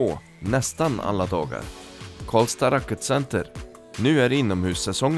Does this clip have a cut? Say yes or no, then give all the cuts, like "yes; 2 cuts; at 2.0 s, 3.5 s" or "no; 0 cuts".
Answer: no; 0 cuts